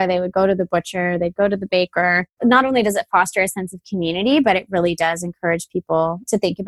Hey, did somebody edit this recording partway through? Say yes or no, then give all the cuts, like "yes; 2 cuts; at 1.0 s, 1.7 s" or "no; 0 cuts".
no; 0 cuts